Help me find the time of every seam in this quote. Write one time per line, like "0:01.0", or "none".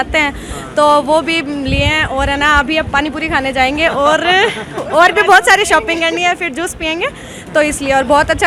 none